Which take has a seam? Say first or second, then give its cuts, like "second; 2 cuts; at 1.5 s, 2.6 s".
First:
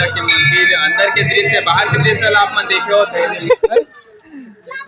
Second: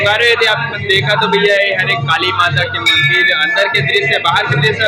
first; 1 cut; at 3.3 s